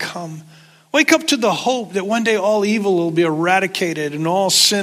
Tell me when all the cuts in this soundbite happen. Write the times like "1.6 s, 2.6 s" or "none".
none